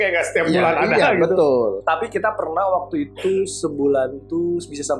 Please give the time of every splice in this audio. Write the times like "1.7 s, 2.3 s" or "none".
none

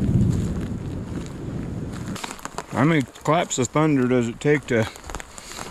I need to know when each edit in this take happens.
1.7 s

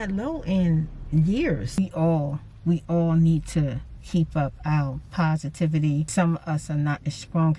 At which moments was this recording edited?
1.8 s, 6.1 s

